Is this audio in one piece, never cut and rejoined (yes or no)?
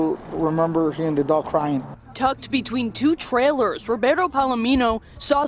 yes